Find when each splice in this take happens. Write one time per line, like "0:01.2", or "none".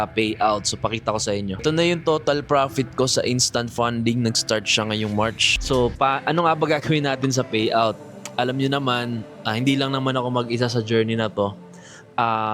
0:01.6
0:05.5